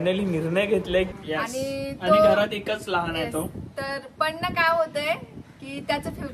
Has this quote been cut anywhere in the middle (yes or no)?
yes